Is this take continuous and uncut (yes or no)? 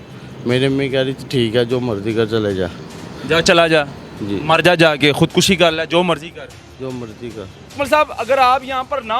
no